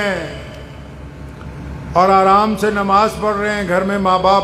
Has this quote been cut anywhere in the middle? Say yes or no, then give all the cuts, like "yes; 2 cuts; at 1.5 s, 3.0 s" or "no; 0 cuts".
no; 0 cuts